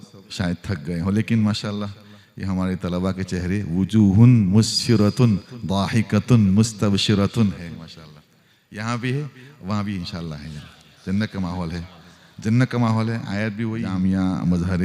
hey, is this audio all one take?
no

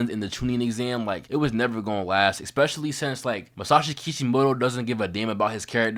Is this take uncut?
yes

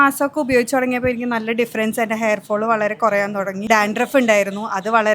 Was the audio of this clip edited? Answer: yes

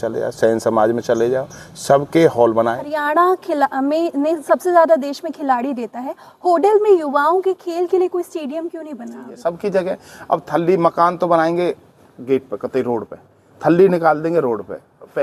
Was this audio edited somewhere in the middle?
yes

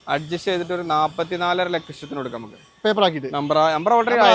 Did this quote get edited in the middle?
no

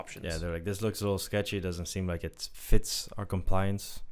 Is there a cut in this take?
no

